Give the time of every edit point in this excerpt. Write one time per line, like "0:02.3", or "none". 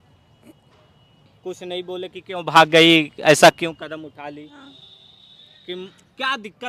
0:04.6